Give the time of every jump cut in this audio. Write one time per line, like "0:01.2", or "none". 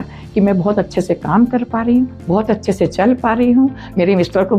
none